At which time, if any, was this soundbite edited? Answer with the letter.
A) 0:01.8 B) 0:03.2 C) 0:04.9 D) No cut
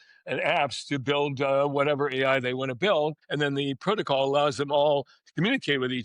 B